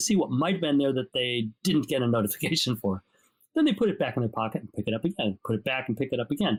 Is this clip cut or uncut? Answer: uncut